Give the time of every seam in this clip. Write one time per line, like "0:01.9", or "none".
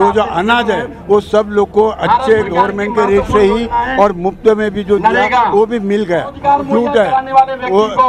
0:06.3